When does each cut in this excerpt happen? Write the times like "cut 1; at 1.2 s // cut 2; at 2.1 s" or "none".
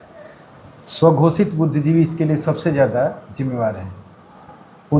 none